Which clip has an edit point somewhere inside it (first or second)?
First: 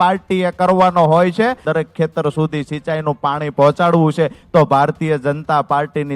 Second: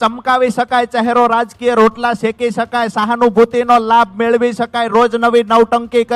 first